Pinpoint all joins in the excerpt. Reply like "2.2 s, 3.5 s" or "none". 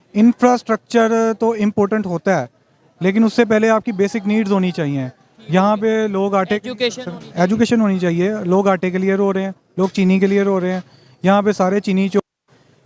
none